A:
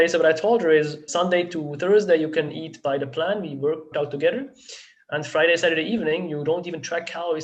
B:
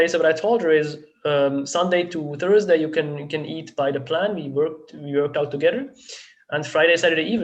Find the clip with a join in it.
A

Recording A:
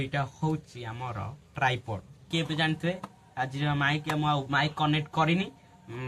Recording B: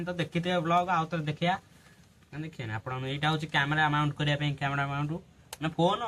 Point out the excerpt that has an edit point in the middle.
A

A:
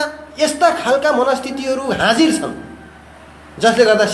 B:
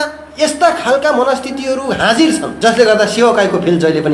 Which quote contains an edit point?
B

